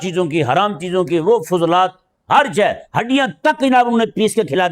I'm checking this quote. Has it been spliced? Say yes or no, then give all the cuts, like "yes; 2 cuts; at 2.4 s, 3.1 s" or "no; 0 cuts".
no; 0 cuts